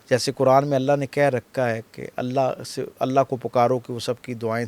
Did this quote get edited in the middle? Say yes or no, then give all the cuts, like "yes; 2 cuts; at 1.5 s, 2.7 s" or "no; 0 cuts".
no; 0 cuts